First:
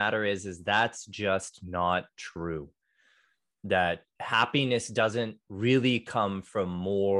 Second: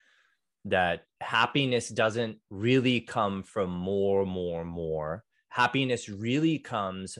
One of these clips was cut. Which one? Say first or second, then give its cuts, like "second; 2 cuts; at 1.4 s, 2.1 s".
second; 1 cut; at 5.4 s